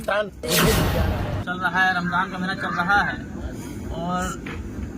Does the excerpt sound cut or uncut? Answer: cut